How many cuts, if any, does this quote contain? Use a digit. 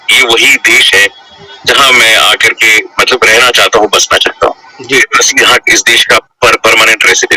1